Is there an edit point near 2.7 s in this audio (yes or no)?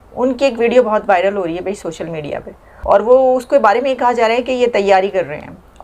yes